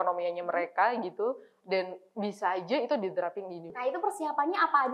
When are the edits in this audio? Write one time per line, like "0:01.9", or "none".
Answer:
0:03.7